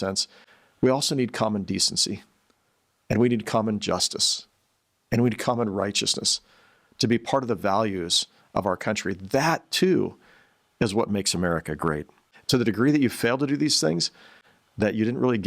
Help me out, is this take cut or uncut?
cut